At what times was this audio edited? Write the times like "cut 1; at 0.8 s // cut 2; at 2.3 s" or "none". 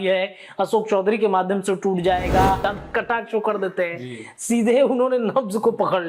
cut 1; at 2.7 s